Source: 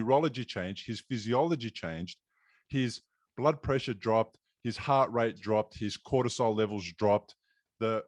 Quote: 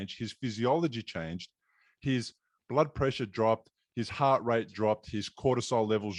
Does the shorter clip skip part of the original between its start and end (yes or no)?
no